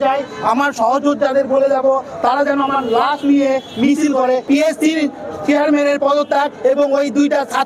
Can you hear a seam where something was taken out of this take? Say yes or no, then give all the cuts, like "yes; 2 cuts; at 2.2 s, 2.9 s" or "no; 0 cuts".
yes; 1 cut; at 4.4 s